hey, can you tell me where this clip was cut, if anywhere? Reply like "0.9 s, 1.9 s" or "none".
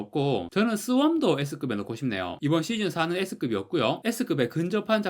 2.3 s